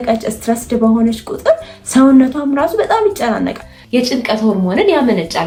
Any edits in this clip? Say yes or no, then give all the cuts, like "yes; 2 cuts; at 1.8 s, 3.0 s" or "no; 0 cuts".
no; 0 cuts